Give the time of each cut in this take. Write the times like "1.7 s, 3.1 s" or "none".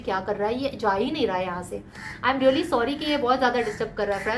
none